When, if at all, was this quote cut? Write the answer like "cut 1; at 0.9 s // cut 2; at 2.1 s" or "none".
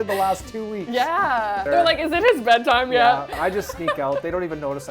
cut 1; at 1.7 s // cut 2; at 3.4 s